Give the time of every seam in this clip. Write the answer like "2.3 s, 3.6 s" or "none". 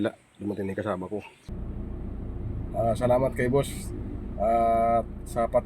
1.5 s